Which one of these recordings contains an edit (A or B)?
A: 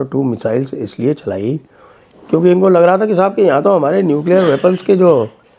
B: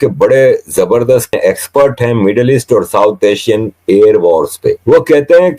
B